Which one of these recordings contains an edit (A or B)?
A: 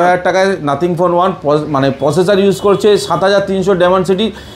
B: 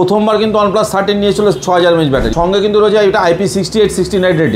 B